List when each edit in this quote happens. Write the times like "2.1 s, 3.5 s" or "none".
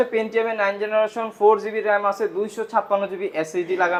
none